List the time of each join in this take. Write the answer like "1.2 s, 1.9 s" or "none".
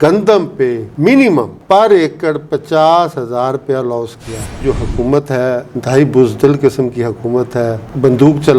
1.6 s, 4.6 s